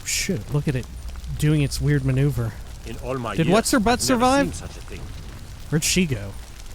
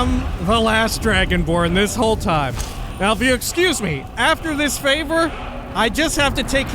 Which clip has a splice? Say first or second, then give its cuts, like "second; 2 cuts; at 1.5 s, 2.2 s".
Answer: second; 1 cut; at 5.6 s